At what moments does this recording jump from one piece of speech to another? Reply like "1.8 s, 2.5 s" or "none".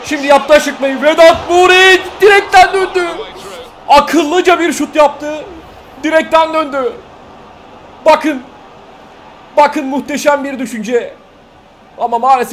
none